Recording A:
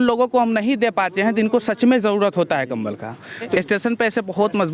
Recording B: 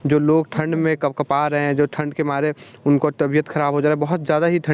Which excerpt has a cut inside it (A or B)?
A